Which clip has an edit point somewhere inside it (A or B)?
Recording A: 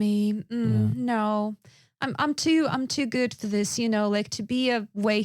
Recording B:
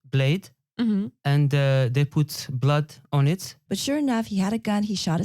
B